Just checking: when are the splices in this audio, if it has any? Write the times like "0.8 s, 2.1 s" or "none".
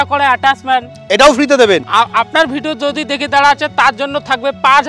1.8 s